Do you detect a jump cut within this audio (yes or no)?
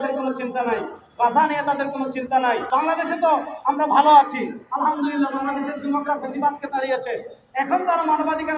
yes